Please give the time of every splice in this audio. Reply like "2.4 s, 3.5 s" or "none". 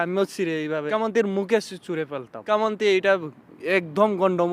0.9 s, 2.3 s